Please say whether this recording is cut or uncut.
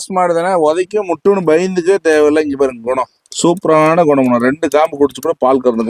uncut